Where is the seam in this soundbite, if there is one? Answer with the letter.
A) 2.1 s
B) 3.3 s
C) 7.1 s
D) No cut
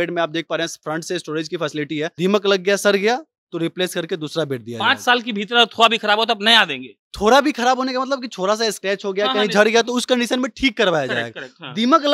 A